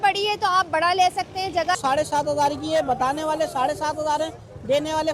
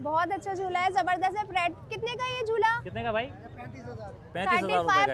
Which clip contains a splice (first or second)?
first